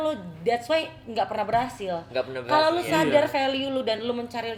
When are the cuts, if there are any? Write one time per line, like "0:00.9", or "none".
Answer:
none